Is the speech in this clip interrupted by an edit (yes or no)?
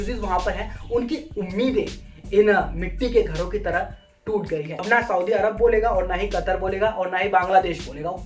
yes